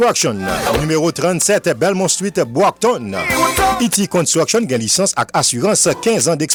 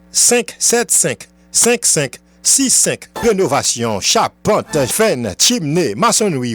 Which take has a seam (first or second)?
second